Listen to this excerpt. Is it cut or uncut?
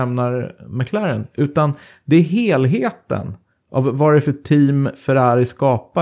uncut